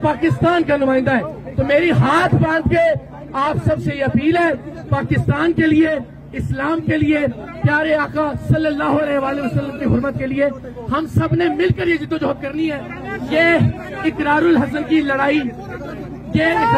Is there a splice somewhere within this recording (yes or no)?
no